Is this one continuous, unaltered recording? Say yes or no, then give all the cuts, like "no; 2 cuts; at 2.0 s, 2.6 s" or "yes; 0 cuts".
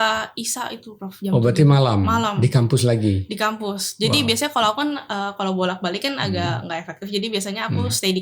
yes; 0 cuts